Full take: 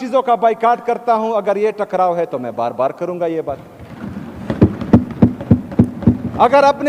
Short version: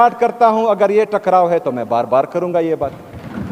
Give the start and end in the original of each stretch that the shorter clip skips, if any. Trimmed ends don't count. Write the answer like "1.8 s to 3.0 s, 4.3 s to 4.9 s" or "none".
none